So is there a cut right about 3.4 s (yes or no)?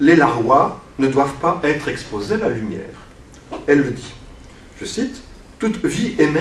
yes